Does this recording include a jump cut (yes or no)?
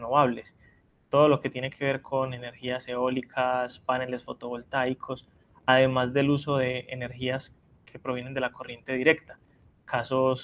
yes